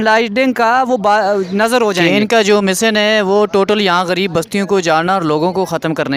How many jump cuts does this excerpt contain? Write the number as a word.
one